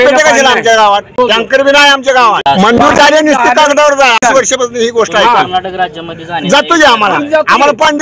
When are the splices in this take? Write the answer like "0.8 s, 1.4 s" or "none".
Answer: 1.1 s, 2.4 s, 4.2 s